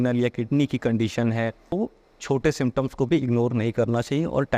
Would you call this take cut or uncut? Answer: cut